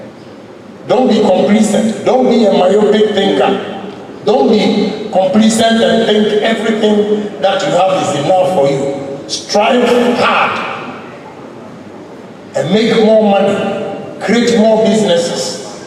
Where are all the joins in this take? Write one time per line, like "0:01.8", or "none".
none